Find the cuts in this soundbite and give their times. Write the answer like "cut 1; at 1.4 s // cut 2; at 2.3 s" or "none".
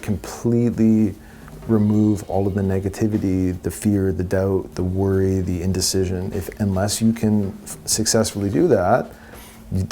none